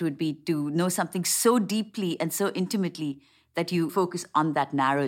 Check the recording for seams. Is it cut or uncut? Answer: uncut